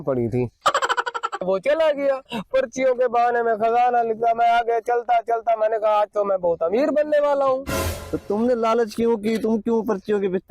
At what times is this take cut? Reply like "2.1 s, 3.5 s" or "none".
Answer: 1.4 s

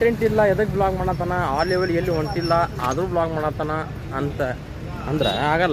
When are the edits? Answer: none

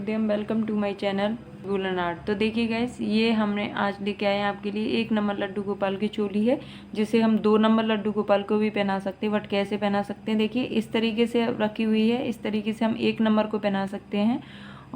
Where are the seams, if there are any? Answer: 1.6 s

